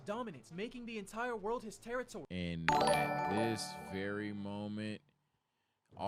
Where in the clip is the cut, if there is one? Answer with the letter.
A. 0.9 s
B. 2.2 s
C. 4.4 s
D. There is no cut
B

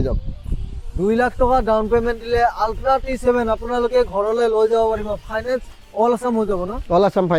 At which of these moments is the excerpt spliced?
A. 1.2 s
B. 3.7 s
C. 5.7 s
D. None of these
D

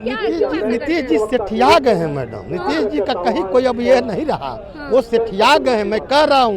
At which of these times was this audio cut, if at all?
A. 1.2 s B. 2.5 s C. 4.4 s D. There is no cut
D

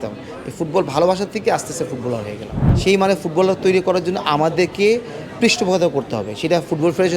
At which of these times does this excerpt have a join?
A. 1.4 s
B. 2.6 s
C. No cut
B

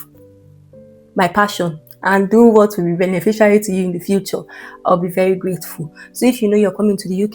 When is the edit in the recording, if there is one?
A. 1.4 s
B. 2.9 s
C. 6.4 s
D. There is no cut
D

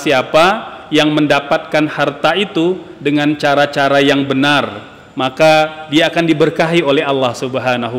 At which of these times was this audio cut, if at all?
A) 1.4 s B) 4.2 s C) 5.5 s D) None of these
D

